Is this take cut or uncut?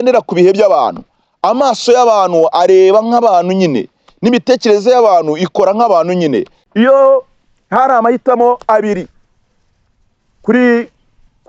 cut